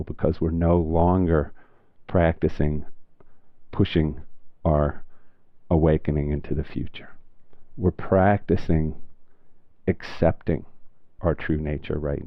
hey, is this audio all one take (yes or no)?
no